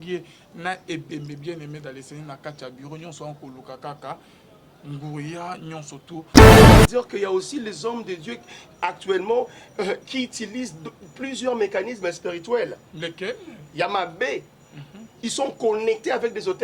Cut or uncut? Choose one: cut